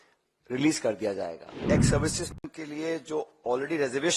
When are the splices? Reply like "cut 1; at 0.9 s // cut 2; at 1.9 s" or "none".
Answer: cut 1; at 1.6 s